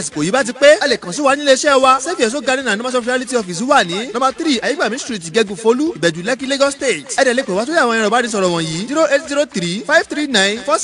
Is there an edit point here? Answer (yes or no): no